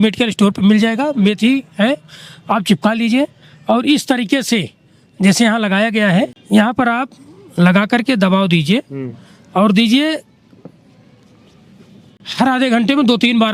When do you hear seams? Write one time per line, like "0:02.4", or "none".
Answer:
0:06.4